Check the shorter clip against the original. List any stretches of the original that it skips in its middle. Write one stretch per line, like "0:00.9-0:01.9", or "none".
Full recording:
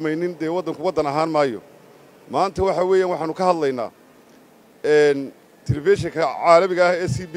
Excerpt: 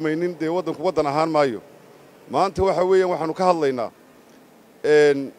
none

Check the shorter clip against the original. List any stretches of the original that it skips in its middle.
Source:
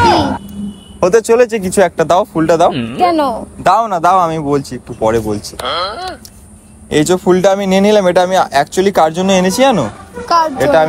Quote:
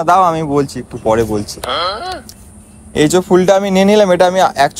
none

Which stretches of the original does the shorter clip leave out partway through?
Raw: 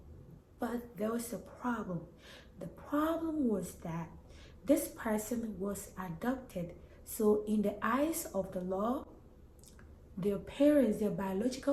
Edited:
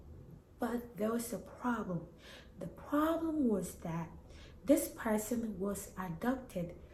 none

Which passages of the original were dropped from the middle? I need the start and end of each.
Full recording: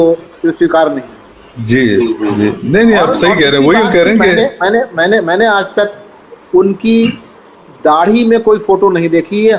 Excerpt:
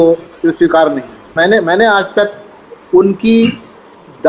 0:01.3-0:04.9

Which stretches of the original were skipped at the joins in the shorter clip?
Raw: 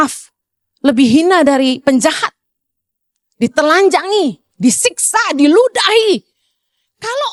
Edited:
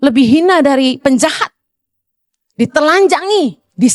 none

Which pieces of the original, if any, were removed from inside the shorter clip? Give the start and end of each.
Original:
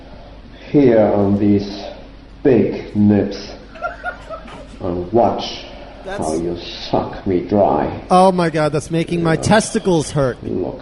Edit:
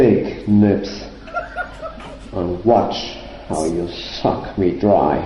0:05.8-0:06.0

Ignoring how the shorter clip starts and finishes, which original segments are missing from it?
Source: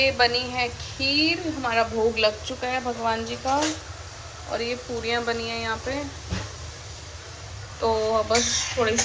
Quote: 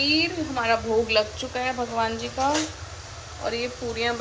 none

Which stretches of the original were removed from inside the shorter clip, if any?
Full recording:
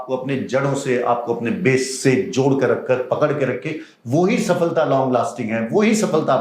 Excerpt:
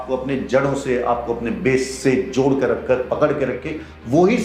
none

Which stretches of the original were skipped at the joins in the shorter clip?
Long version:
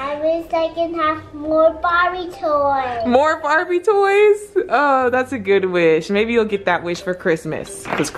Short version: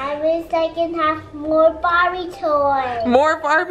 none

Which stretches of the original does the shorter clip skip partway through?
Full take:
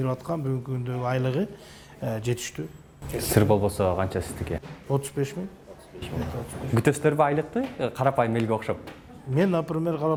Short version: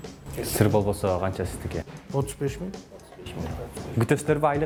none

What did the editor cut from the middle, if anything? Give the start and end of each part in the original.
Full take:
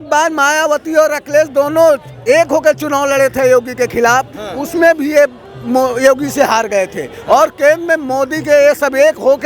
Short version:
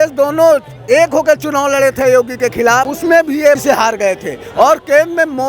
0:04.3-0:04.6
0:05.3-0:06.3

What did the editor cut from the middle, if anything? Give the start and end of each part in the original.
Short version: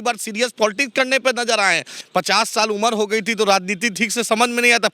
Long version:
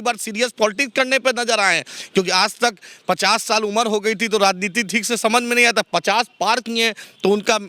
0:01.9-0:02.9

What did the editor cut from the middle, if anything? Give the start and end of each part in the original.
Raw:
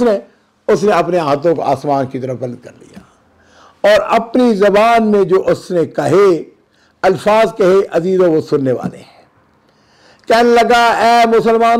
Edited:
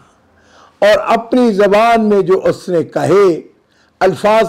none

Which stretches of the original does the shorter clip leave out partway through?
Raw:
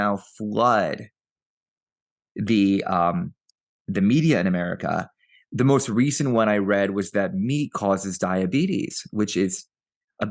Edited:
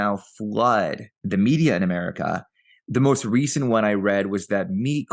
0:01.1-0:03.7

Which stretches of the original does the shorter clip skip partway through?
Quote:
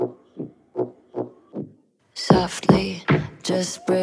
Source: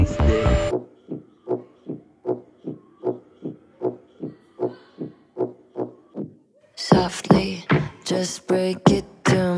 0:02.5-0:05.6

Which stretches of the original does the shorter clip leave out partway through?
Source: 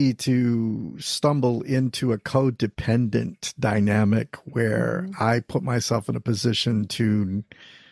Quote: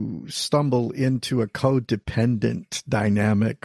none

